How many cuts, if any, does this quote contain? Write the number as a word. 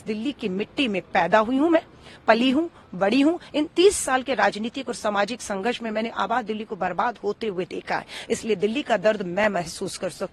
zero